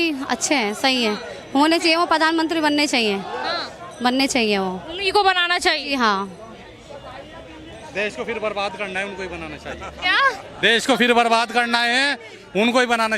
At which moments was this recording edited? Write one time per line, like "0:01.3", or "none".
none

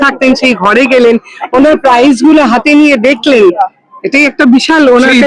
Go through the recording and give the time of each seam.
none

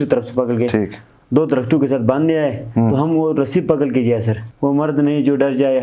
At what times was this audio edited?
0:04.4

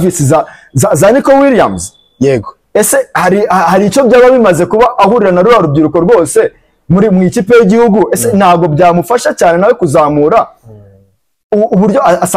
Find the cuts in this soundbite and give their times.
none

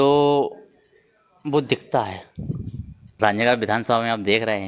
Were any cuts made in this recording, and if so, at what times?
0:03.2

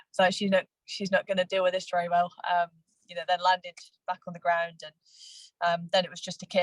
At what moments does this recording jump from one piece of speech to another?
none

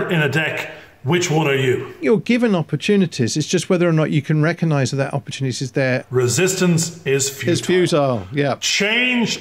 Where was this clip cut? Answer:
0:02.0
0:05.7

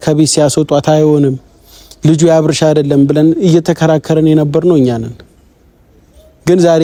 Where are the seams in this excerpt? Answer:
none

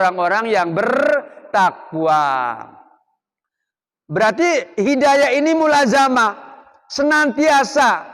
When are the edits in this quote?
none

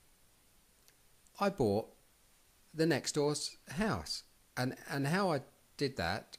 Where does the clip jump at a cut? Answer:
none

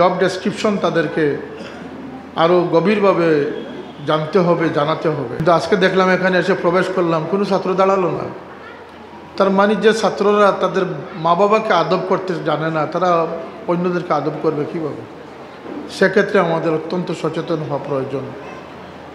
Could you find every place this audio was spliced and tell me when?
0:05.4

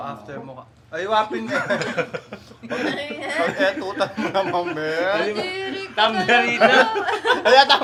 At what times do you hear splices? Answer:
none

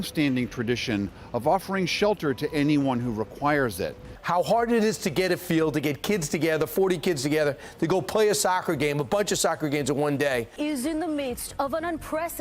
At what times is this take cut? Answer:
0:04.0
0:10.5

